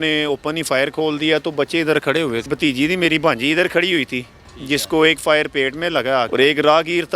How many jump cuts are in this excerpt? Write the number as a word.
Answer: two